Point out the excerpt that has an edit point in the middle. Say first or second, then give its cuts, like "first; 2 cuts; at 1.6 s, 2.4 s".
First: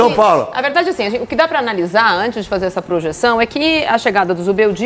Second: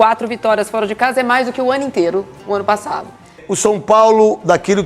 second; 1 cut; at 3.4 s